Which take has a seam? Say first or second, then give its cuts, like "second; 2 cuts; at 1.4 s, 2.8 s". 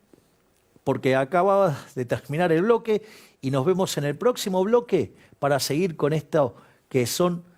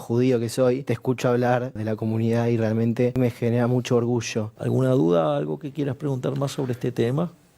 second; 4 cuts; at 0.9 s, 1.8 s, 3.2 s, 4.5 s